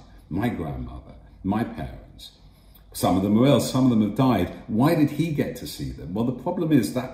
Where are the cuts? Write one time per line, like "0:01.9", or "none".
none